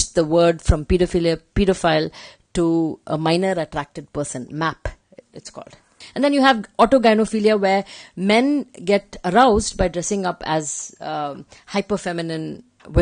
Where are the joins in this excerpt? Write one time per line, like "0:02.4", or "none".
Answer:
0:06.0